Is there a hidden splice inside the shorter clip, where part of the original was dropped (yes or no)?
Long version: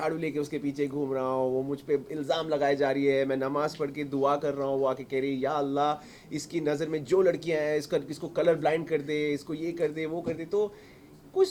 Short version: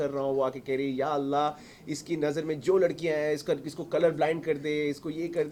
no